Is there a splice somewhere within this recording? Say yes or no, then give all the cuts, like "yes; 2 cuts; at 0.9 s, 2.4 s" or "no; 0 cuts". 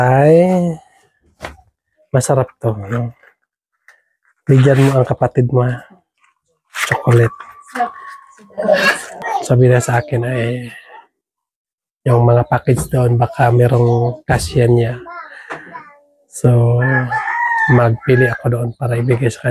yes; 1 cut; at 9.1 s